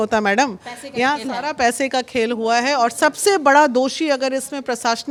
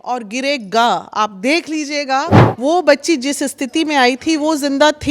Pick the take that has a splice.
second; 1 cut; at 2.4 s

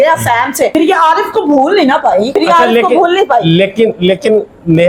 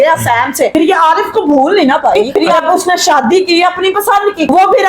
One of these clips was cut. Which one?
second; 1 cut; at 2.5 s

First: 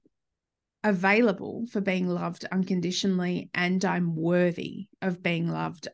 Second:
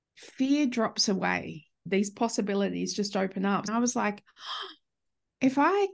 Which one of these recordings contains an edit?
second; 2 cuts; at 1.8 s, 3.7 s

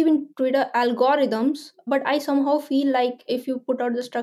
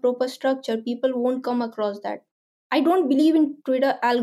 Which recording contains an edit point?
first; 2 cuts; at 1.8 s, 3.2 s

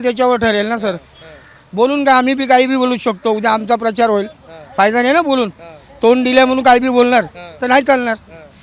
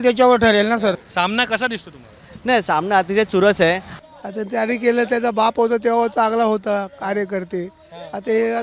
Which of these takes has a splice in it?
second; 2 cuts; at 1.1 s, 3.9 s

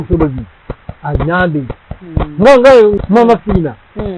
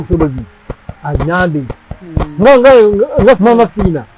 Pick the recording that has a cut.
first; 1 cut; at 3.1 s

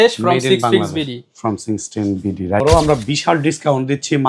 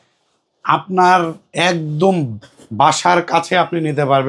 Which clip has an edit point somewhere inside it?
first; 1 cut; at 2.6 s

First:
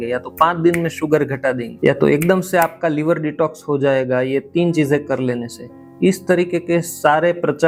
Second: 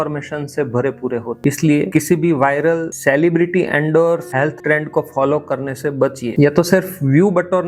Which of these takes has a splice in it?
second; 2 cuts; at 1.3 s, 6.3 s

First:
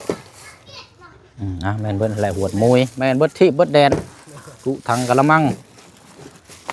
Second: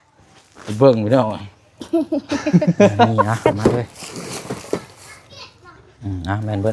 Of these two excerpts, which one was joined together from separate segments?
second; 1 cut; at 3.3 s

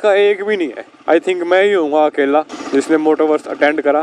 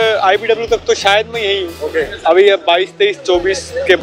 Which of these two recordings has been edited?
first; 1 cut; at 2.6 s

